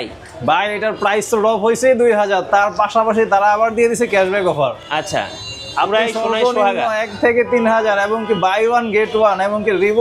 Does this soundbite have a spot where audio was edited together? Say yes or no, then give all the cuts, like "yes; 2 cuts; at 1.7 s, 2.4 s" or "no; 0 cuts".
no; 0 cuts